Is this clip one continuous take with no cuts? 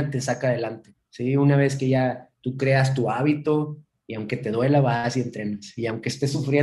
yes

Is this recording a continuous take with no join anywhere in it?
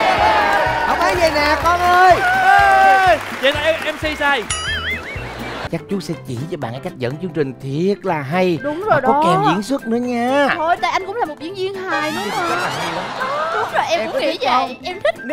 no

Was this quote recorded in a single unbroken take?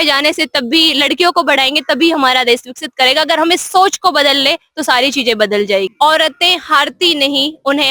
no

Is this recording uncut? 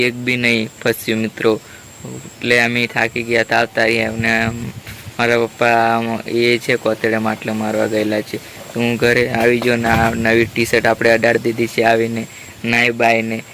yes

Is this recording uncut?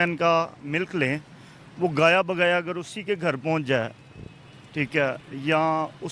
yes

